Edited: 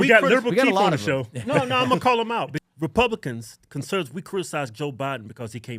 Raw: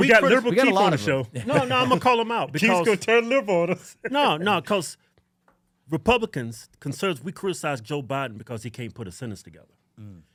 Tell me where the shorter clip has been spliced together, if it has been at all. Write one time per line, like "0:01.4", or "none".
0:02.5